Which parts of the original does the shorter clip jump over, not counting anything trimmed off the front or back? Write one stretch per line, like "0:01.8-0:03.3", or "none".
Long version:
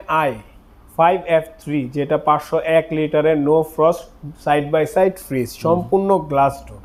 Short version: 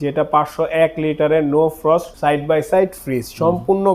0:04.0-0:04.3